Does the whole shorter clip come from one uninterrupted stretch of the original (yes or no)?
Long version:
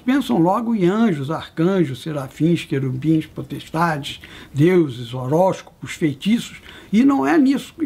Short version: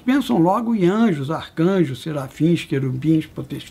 yes